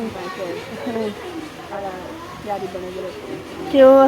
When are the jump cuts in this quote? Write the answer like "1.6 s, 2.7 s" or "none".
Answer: 1.8 s